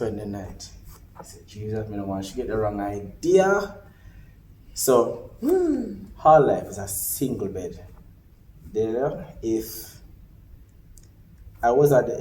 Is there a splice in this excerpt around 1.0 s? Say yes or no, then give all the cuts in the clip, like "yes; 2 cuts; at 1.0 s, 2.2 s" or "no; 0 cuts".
yes; 1 cut; at 1.0 s